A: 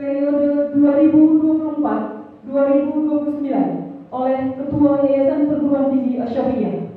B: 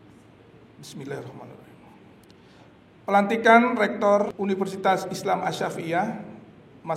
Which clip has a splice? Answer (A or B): B